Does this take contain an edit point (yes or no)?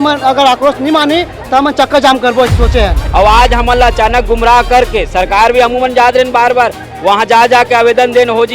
yes